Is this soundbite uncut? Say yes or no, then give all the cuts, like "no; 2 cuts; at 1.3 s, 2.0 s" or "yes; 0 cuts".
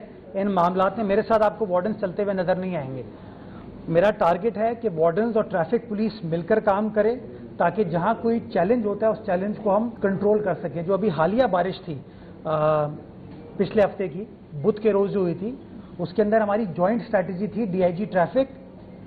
yes; 0 cuts